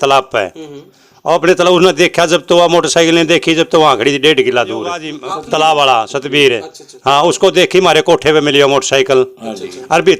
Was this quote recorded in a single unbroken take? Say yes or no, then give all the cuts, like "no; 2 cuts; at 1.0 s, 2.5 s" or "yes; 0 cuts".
no; 1 cut; at 5.1 s